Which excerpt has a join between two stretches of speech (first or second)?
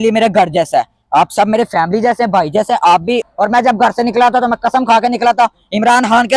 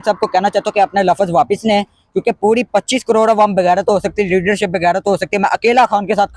first